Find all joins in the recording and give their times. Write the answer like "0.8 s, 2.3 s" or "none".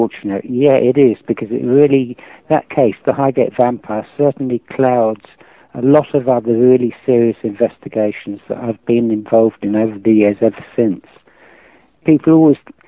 none